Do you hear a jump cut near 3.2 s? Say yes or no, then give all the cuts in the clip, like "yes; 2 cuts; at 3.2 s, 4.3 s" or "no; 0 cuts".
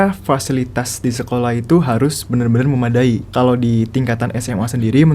yes; 1 cut; at 3.2 s